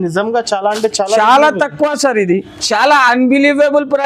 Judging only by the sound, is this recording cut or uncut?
cut